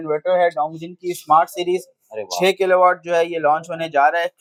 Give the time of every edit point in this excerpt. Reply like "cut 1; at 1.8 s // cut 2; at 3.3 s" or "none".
none